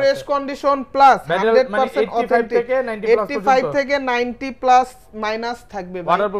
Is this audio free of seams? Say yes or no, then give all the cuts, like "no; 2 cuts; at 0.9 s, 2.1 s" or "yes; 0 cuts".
yes; 0 cuts